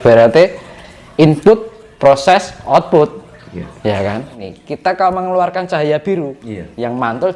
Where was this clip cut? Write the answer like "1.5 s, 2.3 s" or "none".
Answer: 4.4 s